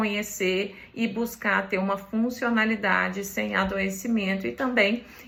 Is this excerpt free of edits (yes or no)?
yes